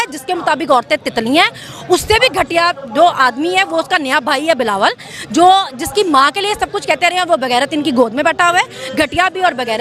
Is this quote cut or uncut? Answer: uncut